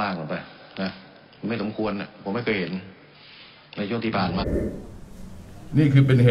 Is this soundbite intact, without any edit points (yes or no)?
no